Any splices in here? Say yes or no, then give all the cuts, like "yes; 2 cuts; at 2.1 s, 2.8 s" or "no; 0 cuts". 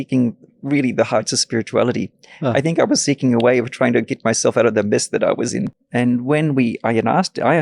yes; 1 cut; at 5.8 s